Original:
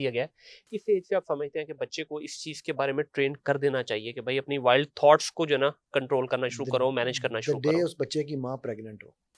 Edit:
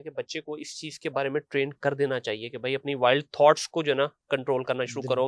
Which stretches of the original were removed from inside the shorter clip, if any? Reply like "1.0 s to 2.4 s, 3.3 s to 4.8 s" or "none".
none